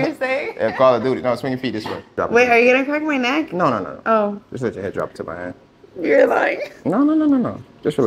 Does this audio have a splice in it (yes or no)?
yes